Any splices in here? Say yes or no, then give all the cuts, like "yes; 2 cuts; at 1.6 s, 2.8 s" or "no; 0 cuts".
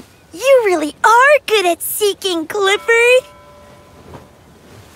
yes; 1 cut; at 3.3 s